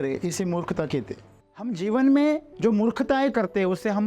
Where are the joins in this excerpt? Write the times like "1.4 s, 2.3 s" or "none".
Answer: 1.8 s, 2.5 s

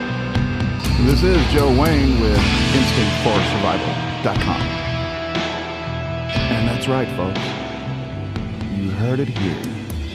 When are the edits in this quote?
4.1 s

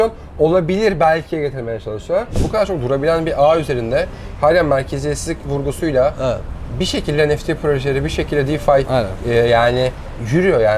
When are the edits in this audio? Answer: 2.4 s

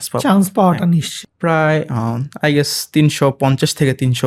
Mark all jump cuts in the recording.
1.1 s

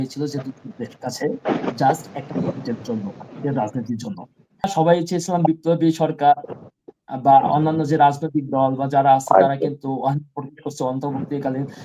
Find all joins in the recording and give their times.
4.7 s

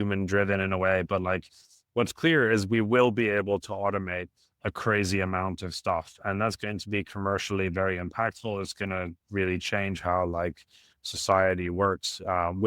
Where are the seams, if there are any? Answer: none

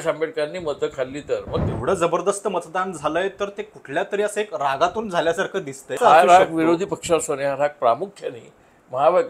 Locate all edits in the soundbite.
1.6 s, 6.0 s

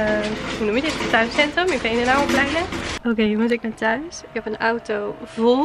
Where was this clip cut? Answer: 2.8 s

